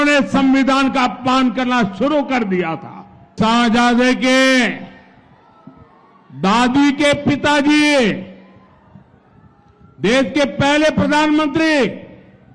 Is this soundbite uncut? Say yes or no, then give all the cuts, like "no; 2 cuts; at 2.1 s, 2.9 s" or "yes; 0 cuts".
no; 1 cut; at 3.3 s